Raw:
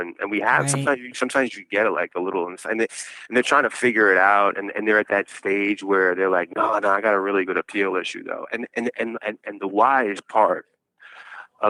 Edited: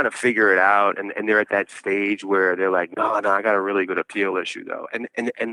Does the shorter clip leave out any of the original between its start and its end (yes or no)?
no